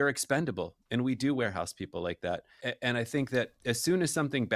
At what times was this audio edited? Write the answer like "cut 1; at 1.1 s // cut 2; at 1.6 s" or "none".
cut 1; at 2.6 s

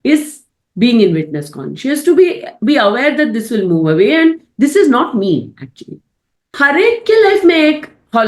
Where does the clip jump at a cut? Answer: cut 1; at 6.5 s

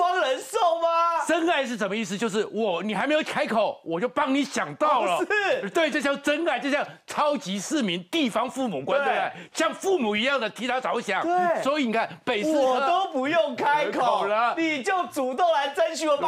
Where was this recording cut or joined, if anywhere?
none

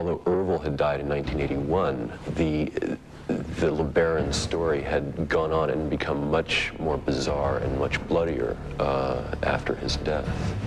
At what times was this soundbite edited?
cut 1; at 7.5 s

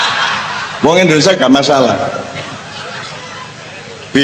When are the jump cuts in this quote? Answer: none

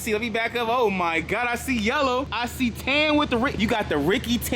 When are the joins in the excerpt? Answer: cut 1; at 2.4 s // cut 2; at 3.5 s

